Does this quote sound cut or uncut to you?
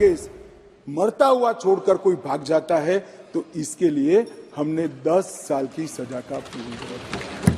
uncut